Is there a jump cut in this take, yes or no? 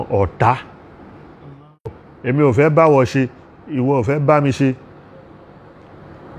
yes